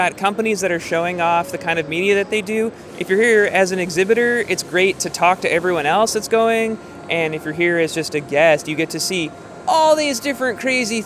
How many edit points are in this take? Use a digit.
1